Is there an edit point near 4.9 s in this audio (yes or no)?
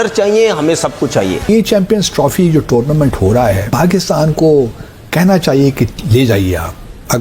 no